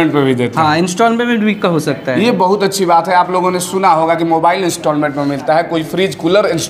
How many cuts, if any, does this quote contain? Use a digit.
0